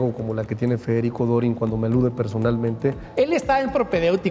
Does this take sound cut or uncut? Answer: cut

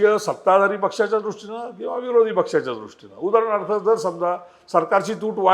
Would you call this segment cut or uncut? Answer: uncut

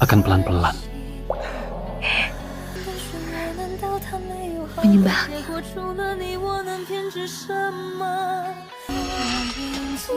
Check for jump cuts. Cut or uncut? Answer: cut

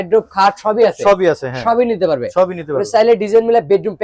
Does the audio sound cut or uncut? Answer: uncut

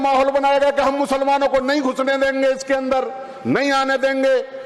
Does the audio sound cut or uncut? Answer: uncut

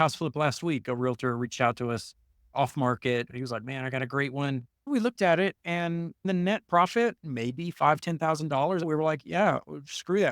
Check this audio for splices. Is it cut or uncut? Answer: cut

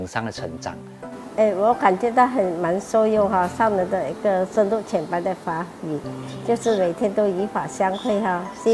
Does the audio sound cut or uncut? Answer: cut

